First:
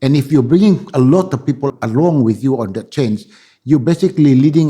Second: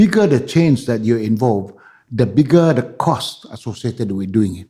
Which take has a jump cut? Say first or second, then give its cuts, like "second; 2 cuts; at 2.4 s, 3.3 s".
first; 1 cut; at 1.8 s